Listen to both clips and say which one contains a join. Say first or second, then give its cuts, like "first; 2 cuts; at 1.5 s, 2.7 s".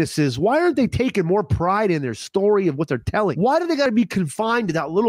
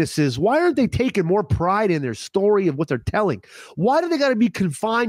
first; 1 cut; at 3.8 s